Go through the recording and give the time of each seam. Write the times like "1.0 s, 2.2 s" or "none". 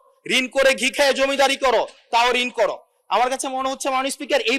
none